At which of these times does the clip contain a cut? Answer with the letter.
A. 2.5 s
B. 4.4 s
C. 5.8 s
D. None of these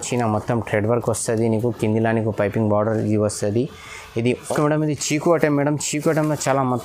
B